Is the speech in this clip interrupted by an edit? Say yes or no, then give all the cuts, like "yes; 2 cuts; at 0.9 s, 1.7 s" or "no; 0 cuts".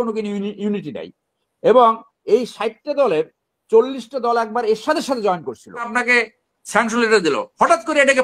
yes; 1 cut; at 5.9 s